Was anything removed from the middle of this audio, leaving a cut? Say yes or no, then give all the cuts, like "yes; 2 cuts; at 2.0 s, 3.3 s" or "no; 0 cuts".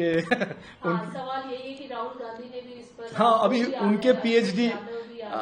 no; 0 cuts